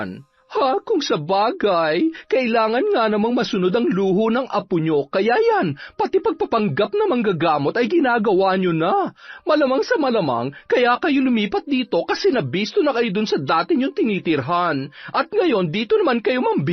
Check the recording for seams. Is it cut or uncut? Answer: uncut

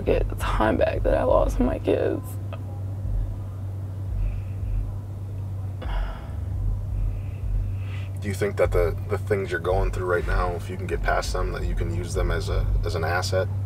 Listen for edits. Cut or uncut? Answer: uncut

